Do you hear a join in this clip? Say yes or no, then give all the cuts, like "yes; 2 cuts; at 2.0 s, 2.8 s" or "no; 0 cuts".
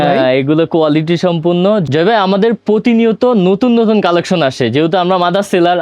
yes; 1 cut; at 1.8 s